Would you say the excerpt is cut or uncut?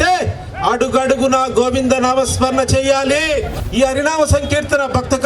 cut